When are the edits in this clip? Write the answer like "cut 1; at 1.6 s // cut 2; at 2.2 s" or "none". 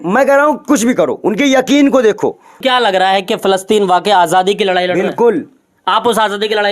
cut 1; at 2.6 s